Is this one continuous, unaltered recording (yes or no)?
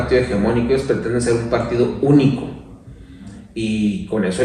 yes